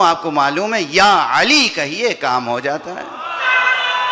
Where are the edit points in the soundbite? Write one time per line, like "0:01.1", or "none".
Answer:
none